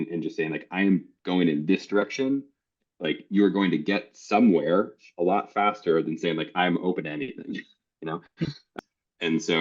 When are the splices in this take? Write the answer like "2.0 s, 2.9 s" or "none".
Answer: 8.7 s